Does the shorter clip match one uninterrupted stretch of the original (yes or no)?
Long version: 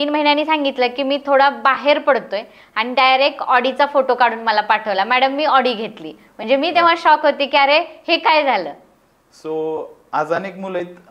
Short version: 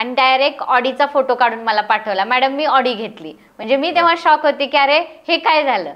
yes